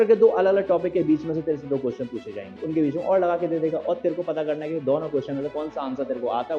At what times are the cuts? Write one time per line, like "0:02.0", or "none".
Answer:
none

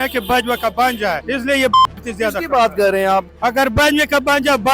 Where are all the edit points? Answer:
0:01.2
0:03.3

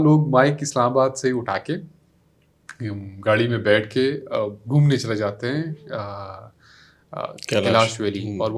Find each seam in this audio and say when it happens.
none

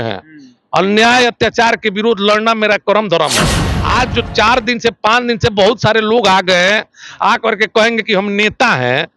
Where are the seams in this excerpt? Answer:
0:03.7

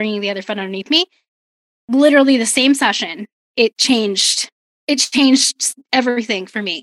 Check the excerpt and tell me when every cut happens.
0:03.8

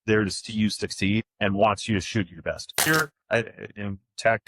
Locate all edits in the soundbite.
0:01.3
0:02.8

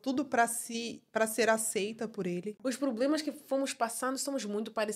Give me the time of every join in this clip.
0:02.5

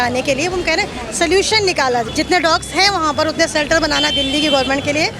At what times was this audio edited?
0:02.1

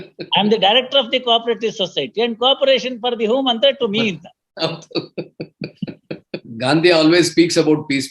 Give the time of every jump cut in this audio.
0:06.5

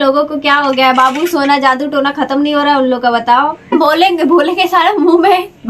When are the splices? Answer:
0:03.7

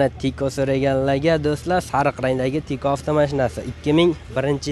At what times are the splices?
none

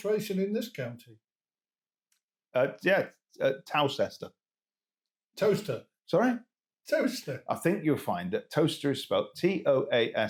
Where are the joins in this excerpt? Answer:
none

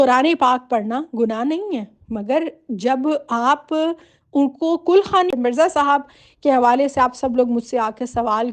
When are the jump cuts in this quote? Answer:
0:05.3

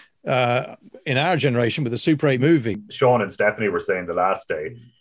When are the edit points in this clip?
0:02.5

